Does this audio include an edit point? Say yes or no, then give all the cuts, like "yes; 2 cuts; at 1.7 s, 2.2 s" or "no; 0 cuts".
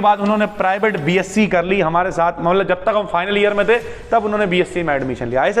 no; 0 cuts